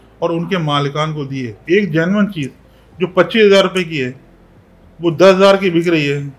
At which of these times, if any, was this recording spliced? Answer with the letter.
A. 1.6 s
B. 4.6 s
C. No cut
A